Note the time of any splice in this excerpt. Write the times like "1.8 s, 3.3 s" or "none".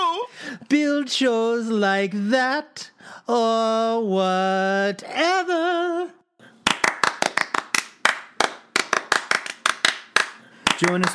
none